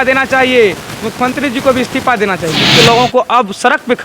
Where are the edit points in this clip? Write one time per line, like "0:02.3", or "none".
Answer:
0:02.7